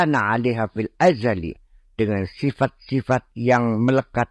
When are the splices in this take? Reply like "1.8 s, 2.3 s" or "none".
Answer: none